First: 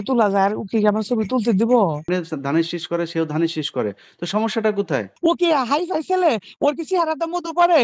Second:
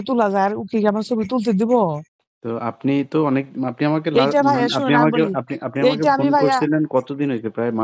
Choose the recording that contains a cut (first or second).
first